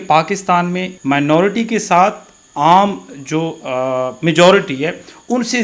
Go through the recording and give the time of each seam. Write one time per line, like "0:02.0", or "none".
0:00.9